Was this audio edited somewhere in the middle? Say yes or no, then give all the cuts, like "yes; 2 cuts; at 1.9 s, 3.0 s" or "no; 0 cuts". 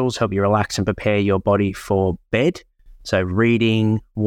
no; 0 cuts